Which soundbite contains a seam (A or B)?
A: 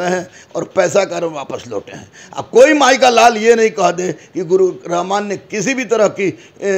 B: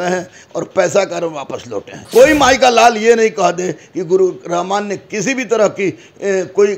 B